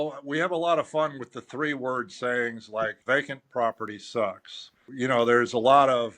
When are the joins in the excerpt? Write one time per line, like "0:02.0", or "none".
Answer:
0:03.0
0:04.9